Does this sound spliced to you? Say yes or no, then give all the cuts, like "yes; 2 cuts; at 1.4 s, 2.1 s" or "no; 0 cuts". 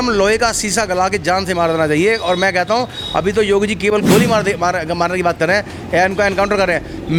no; 0 cuts